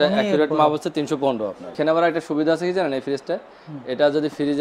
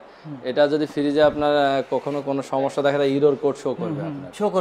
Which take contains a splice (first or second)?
first